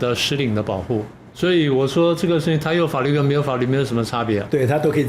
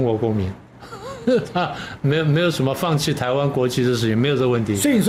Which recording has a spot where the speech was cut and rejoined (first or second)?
first